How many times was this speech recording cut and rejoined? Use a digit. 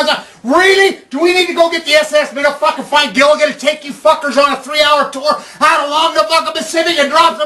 0